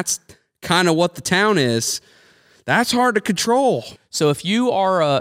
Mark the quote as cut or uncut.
cut